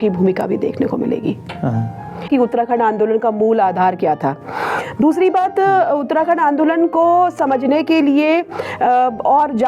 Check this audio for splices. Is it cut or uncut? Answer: cut